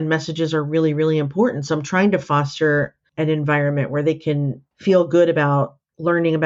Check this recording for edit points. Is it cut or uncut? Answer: uncut